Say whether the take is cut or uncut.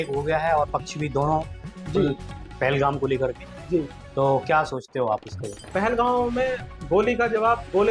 uncut